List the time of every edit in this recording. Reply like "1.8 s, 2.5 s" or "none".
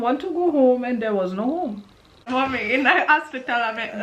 2.3 s